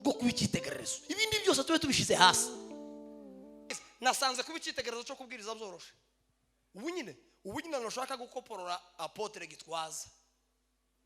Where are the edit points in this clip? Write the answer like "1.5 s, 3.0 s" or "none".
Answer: 3.7 s

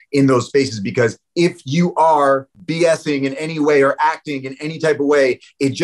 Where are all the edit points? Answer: 2.5 s

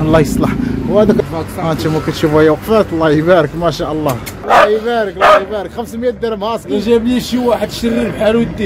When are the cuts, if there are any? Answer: 1.2 s, 4.4 s

